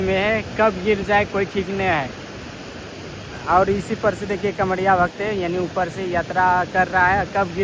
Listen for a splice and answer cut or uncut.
uncut